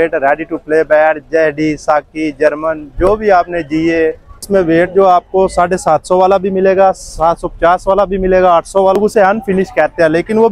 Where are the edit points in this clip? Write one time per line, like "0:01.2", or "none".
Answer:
0:04.3
0:09.0